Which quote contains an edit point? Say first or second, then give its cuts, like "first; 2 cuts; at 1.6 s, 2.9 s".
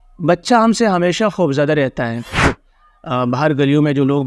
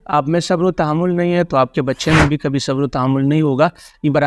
first; 1 cut; at 2.5 s